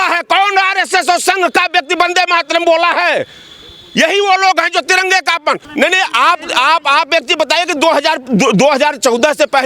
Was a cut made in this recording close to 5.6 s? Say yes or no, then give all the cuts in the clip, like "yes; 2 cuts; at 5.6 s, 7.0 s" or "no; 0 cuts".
yes; 1 cut; at 5.6 s